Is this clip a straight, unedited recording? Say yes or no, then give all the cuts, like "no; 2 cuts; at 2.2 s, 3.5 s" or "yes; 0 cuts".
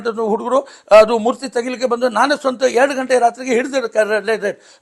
yes; 0 cuts